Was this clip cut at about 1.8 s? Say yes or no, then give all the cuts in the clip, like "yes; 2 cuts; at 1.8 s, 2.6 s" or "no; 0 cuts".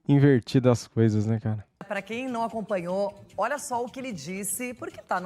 yes; 1 cut; at 1.8 s